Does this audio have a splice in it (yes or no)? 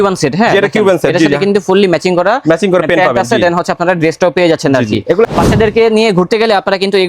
yes